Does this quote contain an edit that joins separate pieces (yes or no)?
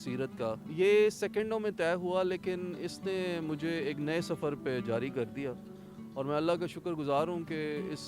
no